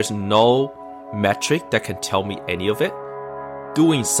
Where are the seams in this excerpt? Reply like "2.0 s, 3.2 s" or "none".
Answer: 3.2 s